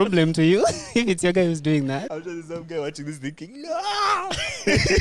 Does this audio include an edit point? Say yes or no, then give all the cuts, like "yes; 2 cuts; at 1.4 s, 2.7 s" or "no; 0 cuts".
yes; 1 cut; at 2.1 s